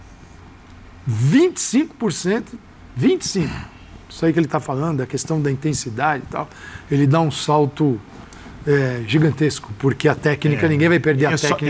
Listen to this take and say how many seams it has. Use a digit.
0